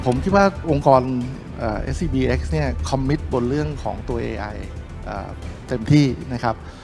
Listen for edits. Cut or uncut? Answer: uncut